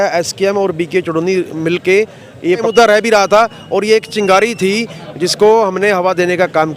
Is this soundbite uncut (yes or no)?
no